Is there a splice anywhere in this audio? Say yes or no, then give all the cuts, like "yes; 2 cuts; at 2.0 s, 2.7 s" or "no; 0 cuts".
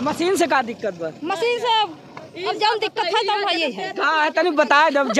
no; 0 cuts